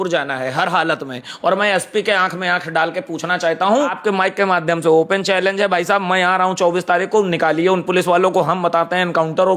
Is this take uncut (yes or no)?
no